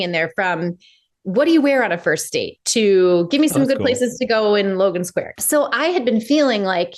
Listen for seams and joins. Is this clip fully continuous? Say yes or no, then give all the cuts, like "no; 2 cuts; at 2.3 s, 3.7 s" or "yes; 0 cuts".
no; 1 cut; at 5.3 s